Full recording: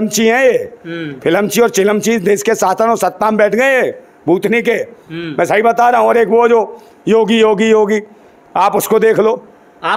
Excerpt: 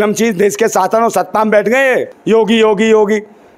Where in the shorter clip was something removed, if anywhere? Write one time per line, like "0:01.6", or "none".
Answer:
0:02.1